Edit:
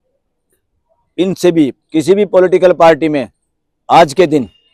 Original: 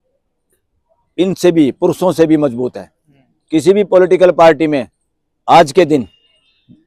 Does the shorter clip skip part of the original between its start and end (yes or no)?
yes